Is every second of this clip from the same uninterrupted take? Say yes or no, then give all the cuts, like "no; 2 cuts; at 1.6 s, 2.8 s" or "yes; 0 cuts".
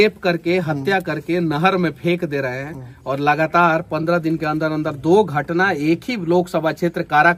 yes; 0 cuts